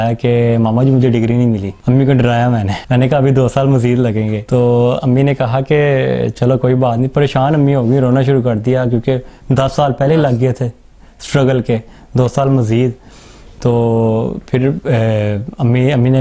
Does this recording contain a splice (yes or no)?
yes